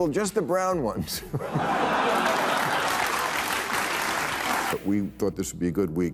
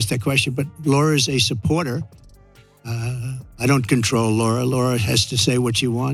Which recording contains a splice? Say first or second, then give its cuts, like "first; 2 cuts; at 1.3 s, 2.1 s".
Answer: first; 1 cut; at 4.7 s